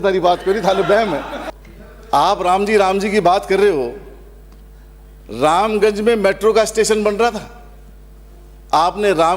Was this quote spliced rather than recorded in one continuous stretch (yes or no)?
yes